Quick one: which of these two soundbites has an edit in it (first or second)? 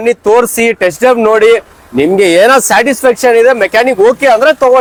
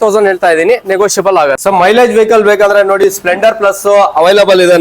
second